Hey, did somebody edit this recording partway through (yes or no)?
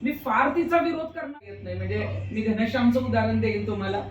yes